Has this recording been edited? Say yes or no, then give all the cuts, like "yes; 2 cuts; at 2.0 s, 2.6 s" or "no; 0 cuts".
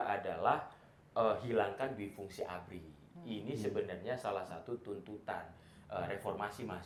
no; 0 cuts